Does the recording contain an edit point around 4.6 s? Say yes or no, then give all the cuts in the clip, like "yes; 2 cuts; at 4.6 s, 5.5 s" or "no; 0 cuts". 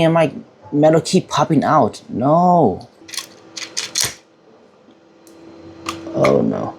no; 1 cut; at 2.9 s